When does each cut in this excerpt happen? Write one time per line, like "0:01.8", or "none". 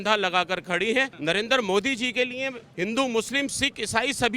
0:01.1